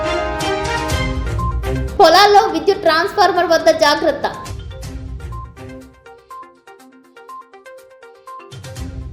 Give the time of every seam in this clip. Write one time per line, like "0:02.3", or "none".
0:00.9